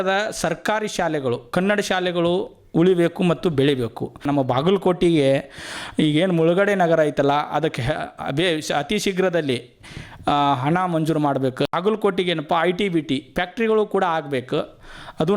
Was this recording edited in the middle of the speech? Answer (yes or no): yes